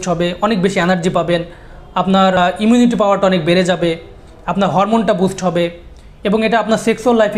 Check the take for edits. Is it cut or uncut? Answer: cut